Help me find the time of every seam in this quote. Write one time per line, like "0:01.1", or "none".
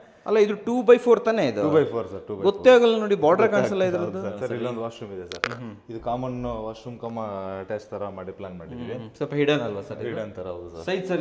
0:04.3